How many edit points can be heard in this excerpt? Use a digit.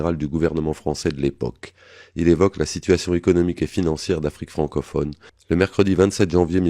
1